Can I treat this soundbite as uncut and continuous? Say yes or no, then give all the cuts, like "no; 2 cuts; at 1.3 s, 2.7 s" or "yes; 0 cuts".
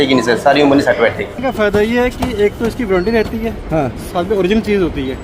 no; 1 cut; at 1.4 s